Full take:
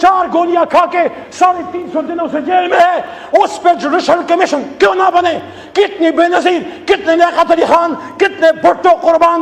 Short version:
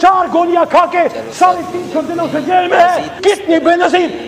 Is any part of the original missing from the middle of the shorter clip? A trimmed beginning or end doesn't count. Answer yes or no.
yes